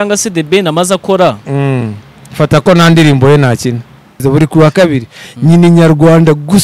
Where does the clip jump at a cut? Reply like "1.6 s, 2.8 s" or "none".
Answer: 4.1 s